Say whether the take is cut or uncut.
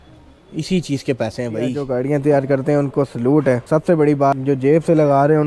cut